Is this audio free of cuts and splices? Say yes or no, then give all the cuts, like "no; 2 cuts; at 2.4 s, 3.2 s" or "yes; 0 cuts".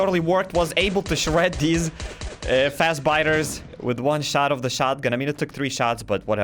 yes; 0 cuts